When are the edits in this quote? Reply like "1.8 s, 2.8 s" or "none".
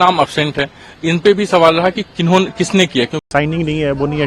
3.2 s